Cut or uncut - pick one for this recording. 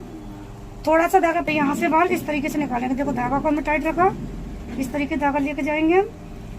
cut